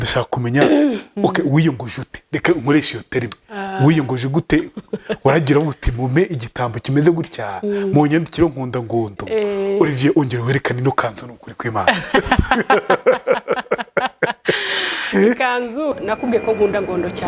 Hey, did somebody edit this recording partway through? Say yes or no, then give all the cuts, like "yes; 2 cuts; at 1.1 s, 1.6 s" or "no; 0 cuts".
yes; 1 cut; at 15.9 s